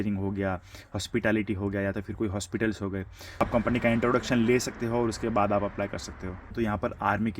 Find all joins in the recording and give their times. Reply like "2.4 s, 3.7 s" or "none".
3.4 s, 6.5 s